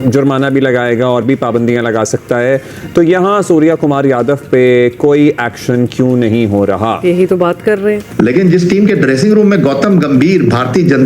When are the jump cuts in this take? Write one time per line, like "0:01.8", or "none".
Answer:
none